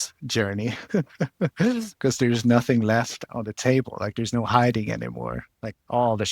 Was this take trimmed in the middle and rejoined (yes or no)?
yes